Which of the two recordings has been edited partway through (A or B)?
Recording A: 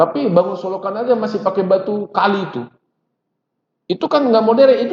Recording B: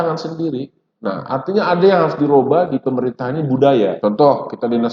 B